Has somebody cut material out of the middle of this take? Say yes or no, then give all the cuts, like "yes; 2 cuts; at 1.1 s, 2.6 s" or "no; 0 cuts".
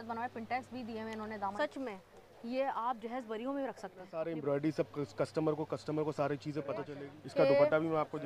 yes; 3 cuts; at 1.5 s, 4.1 s, 7.0 s